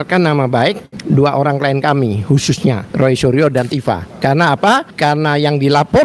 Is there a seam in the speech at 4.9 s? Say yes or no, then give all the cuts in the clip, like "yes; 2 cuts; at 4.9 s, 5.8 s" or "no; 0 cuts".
yes; 4 cuts; at 0.9 s, 2.9 s, 4.1 s, 4.9 s